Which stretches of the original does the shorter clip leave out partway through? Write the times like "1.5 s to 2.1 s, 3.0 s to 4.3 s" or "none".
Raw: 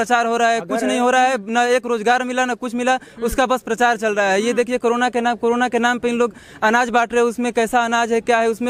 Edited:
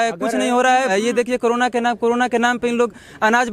1.4 s to 4.3 s